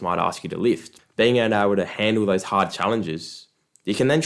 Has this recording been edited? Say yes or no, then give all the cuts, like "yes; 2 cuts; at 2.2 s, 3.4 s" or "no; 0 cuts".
yes; 1 cut; at 0.9 s